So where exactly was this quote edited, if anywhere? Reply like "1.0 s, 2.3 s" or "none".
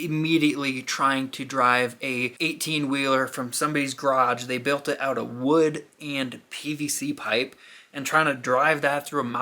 2.3 s